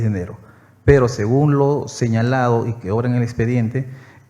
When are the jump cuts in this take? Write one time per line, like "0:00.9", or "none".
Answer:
none